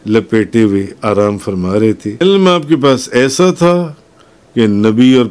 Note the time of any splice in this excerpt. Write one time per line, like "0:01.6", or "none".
0:02.2